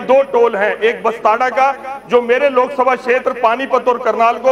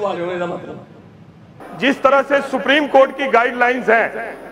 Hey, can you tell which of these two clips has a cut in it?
second; 1 cut; at 1.6 s

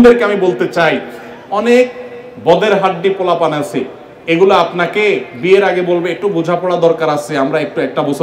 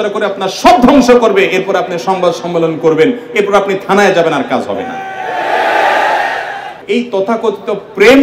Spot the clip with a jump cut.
second; 1 cut; at 6.7 s

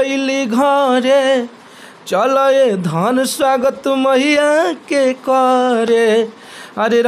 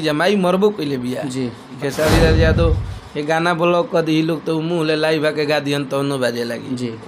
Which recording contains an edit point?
second; 1 cut; at 1.7 s

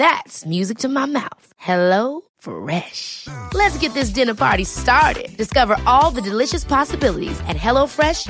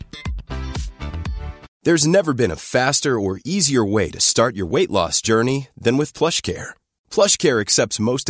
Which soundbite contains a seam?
second; 1 cut; at 1.7 s

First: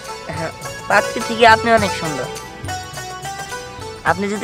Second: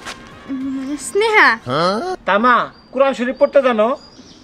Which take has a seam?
first; 1 cut; at 3.5 s

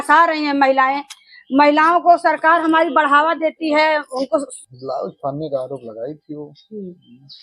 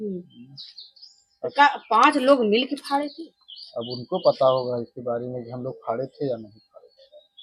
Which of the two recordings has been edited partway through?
first; 1 cut; at 4.6 s

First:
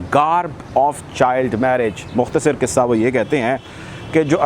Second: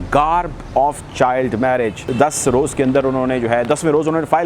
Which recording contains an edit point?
second; 1 cut; at 2.0 s

